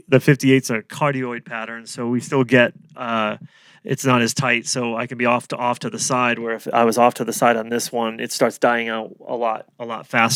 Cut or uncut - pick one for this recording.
uncut